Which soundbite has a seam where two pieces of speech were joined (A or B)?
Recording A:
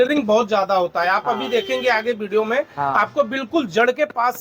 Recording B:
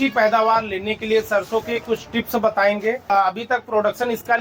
B